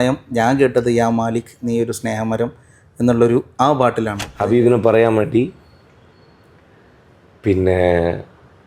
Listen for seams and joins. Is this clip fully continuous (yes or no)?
no